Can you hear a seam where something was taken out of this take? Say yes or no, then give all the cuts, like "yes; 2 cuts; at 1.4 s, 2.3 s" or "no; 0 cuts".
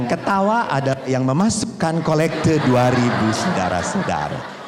no; 0 cuts